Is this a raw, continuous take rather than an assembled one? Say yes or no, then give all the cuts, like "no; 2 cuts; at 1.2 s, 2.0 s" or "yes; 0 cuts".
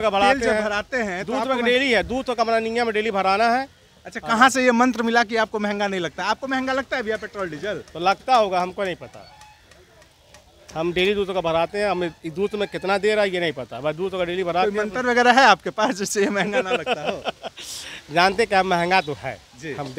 yes; 0 cuts